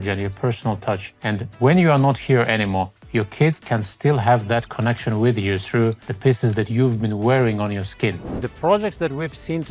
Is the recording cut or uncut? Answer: cut